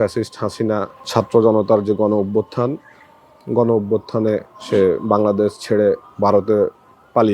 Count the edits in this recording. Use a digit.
3